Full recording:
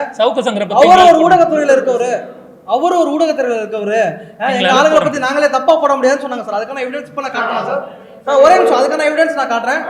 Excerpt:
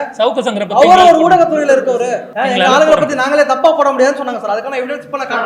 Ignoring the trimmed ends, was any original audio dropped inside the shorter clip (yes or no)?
yes